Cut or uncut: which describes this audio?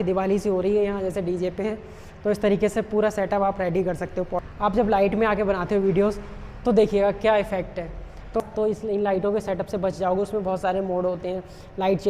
cut